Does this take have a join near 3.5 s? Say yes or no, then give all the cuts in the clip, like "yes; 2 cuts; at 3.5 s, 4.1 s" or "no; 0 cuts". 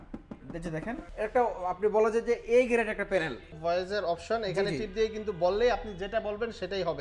yes; 2 cuts; at 1.1 s, 3.5 s